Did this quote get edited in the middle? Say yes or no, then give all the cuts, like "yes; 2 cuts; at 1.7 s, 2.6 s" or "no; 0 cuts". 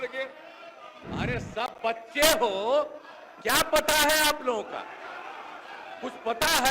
yes; 1 cut; at 0.9 s